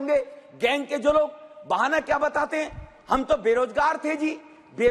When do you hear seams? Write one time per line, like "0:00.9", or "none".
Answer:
none